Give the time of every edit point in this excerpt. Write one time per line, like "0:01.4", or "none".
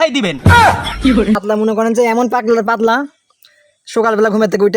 0:01.4